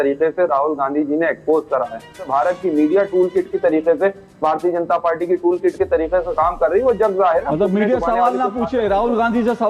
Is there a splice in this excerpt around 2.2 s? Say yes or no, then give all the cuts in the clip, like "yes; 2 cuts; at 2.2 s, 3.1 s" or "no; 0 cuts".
yes; 1 cut; at 2.2 s